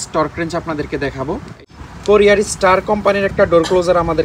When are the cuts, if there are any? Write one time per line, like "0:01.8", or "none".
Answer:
0:01.6